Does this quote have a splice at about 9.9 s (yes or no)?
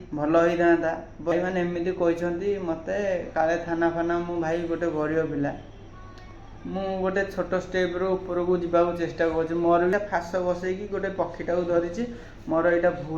yes